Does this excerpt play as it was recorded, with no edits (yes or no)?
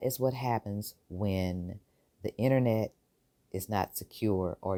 yes